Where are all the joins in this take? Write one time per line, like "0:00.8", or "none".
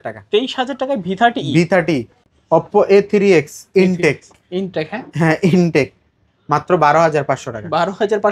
0:02.2